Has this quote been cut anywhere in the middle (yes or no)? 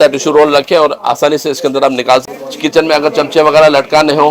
yes